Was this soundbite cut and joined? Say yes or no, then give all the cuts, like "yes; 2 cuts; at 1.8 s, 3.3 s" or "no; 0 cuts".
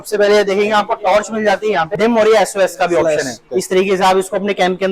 yes; 2 cuts; at 1.9 s, 3.4 s